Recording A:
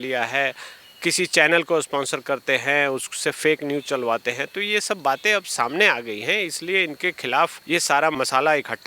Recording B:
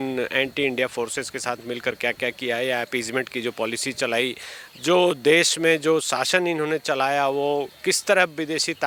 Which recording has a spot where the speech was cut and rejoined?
A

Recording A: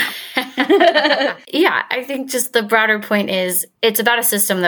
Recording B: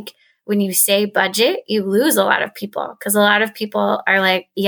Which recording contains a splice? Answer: A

